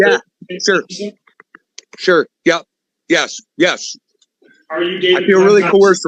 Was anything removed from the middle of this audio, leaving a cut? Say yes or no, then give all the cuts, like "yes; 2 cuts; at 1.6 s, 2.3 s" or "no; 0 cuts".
no; 0 cuts